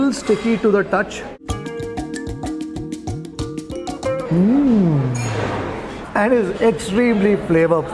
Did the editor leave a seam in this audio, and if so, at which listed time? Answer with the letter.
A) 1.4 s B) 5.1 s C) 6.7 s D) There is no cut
D